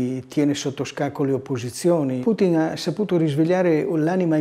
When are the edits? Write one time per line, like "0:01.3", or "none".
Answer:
0:02.2

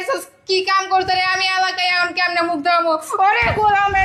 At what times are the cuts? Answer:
none

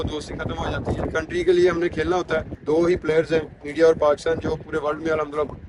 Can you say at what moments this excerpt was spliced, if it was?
0:01.1
0:02.5

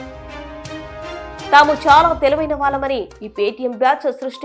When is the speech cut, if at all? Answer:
none

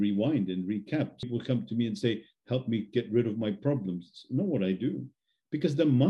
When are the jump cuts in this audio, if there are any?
0:01.3

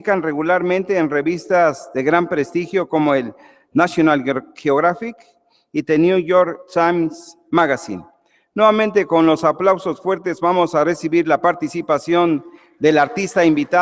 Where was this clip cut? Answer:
0:01.4

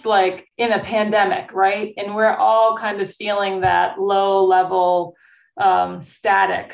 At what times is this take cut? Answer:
none

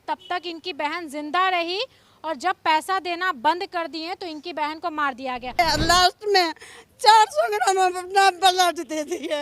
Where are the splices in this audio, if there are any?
0:05.5

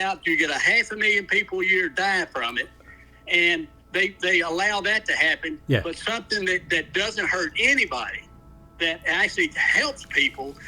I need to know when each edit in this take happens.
none

